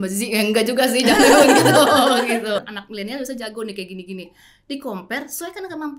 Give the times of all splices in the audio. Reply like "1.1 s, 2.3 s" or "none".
2.6 s